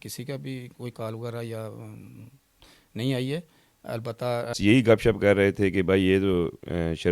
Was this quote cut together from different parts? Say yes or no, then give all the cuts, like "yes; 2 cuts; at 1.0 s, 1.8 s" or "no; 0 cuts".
yes; 1 cut; at 4.6 s